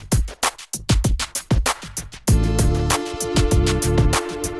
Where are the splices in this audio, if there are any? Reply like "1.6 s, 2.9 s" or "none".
1.5 s

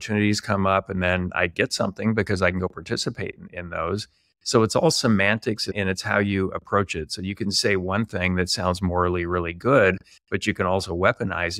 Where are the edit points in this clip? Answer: none

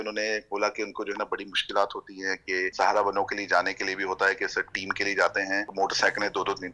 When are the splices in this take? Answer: 2.7 s, 5.7 s

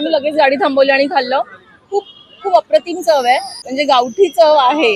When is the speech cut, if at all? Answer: 3.6 s

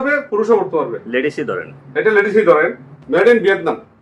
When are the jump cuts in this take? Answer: 2.9 s

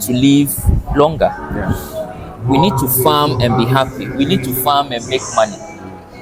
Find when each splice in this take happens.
none

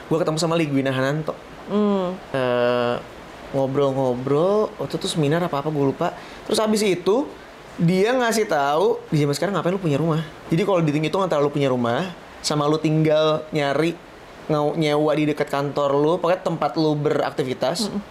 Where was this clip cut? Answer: 2.2 s, 9.0 s, 10.3 s

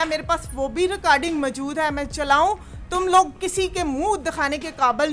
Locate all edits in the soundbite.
none

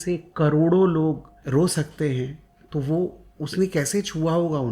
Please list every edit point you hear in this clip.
1.3 s

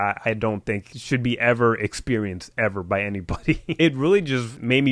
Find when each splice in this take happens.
3.8 s

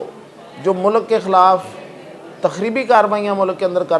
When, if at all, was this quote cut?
none

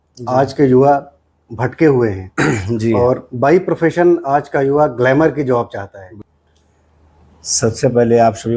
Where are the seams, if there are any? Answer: 6.1 s

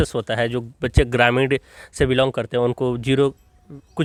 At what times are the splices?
none

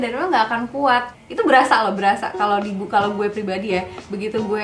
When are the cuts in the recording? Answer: 1.1 s

